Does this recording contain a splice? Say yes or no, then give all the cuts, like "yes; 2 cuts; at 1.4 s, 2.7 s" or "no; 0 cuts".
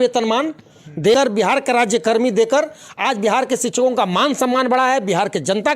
yes; 1 cut; at 1.1 s